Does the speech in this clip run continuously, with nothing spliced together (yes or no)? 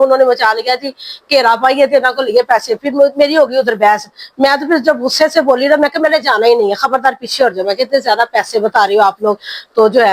yes